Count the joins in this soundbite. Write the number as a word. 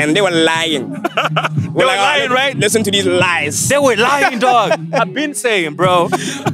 zero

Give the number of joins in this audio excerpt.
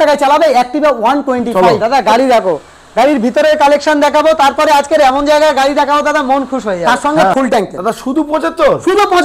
two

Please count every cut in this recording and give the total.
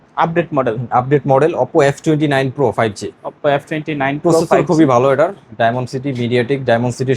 zero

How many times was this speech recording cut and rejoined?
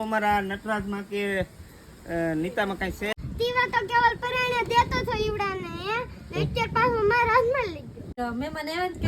two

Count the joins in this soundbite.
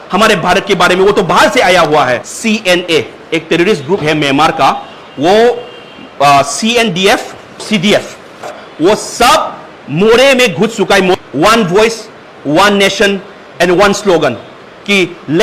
two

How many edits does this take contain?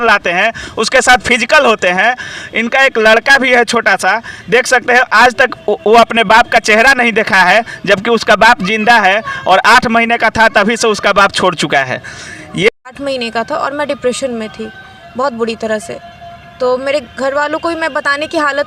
one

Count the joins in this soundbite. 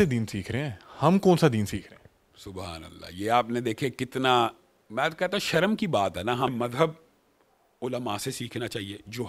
one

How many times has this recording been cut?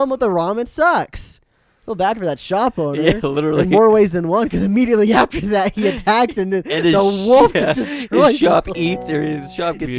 zero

